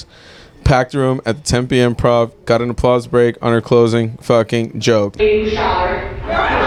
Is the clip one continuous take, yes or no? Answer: yes